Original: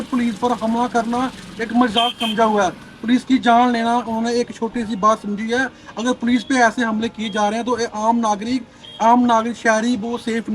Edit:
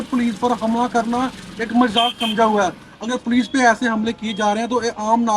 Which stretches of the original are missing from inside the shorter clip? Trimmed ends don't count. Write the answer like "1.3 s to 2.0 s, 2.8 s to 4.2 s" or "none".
2.9 s to 5.8 s